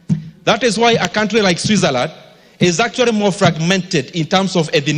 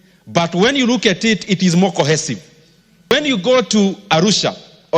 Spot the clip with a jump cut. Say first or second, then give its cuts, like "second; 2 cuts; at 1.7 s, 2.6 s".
second; 1 cut; at 3.1 s